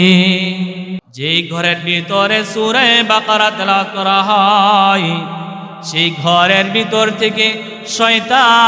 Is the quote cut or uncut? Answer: cut